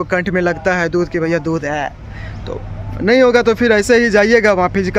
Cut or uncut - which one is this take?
uncut